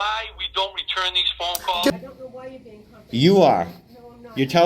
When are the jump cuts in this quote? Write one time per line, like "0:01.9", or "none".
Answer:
0:01.9

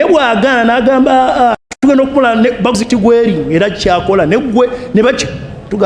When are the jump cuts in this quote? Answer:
0:01.2

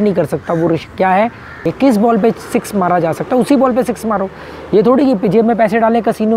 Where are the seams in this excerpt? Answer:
0:01.7

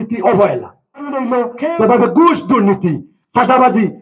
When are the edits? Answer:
0:01.2

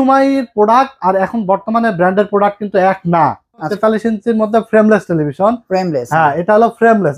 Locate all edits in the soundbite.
0:03.7

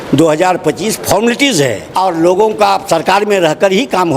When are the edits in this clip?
0:01.8

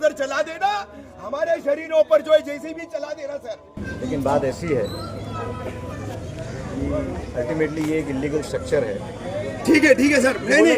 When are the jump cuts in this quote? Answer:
0:03.8

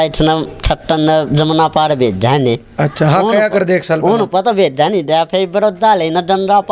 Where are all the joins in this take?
none

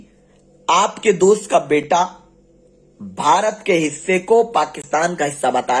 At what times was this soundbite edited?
none

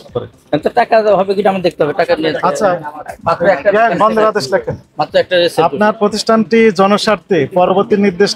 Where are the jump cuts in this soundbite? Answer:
none

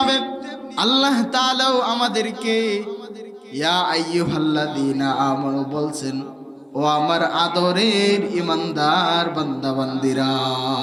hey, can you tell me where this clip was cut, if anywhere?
none

